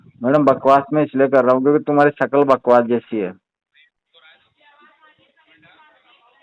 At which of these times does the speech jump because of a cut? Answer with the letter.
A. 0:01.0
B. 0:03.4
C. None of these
C